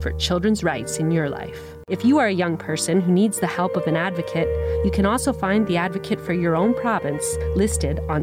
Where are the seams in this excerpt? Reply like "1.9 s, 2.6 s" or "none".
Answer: 1.9 s